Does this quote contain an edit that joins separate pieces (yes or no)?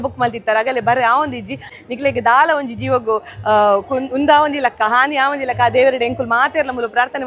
yes